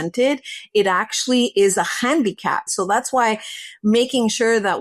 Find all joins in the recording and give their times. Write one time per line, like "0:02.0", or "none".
0:02.7